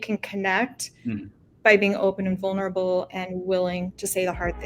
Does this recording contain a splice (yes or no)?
no